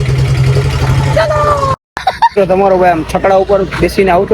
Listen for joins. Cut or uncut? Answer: cut